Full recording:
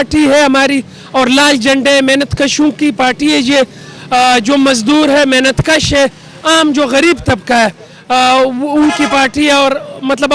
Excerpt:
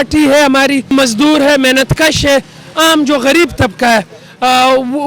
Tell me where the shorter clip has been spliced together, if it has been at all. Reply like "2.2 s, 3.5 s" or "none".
0.9 s

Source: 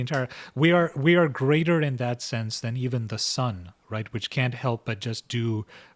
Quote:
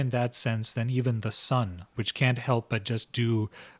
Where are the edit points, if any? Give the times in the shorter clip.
1.9 s

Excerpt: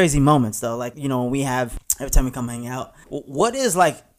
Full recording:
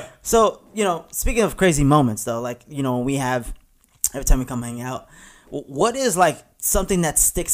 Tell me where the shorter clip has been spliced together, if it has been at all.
0.9 s, 1.8 s, 3.0 s

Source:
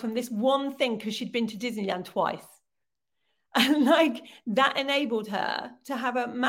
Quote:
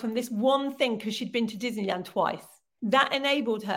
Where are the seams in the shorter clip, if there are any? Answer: 2.7 s

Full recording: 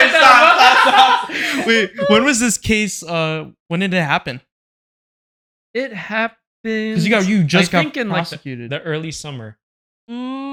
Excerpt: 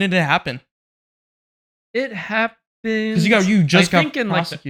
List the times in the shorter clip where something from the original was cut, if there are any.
none

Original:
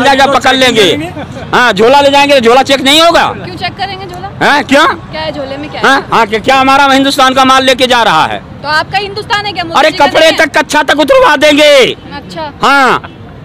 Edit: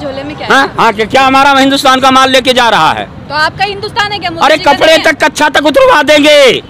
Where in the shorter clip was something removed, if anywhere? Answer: none

